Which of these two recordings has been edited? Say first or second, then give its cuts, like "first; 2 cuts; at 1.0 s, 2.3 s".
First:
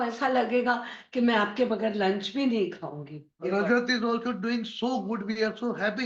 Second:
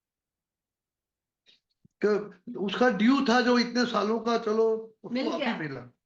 first; 1 cut; at 3.4 s